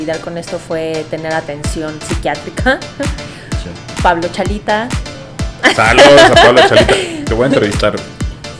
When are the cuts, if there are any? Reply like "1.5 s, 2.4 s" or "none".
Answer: none

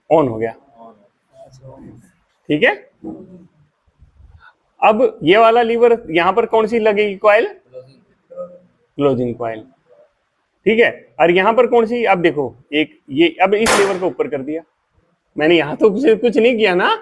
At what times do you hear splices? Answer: none

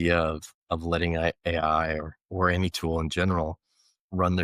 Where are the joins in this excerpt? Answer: none

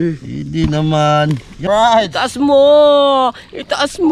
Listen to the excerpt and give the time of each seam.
1.6 s

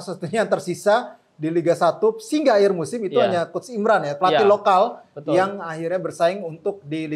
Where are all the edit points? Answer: none

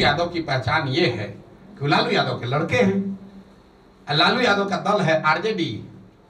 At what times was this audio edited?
none

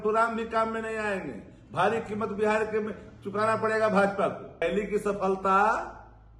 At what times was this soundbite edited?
4.6 s

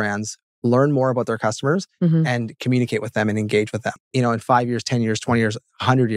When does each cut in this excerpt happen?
3.9 s

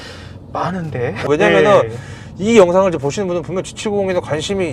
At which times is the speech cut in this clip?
1.3 s

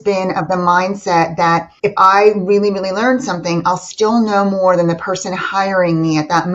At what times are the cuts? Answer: 1.7 s

